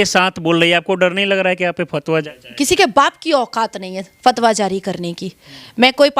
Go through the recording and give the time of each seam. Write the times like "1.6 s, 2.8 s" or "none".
2.4 s